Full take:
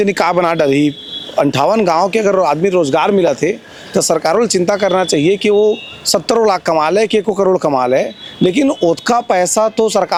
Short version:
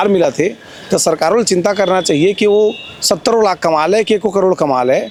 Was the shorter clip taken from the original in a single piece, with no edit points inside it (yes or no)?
yes